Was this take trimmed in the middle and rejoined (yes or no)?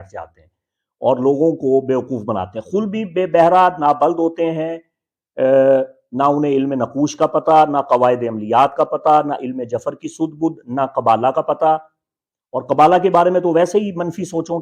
no